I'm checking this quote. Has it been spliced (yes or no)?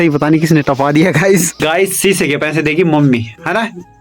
yes